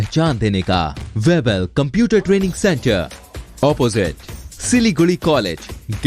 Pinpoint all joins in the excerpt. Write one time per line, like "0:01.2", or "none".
0:01.0

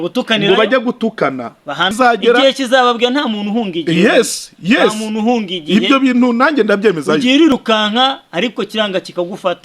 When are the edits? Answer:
0:01.9

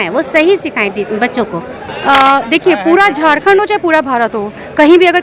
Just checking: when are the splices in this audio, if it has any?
0:01.9

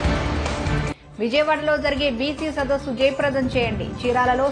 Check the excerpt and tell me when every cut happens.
0:00.9

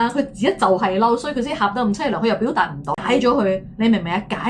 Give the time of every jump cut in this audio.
0:03.0

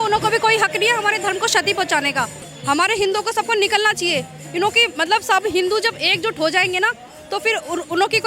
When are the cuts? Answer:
0:02.5

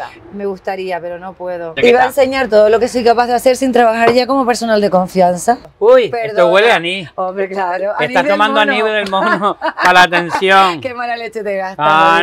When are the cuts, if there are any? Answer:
0:01.8
0:05.7

